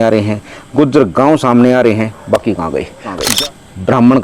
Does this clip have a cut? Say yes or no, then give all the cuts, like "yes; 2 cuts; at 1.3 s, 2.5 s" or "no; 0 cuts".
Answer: yes; 1 cut; at 3.3 s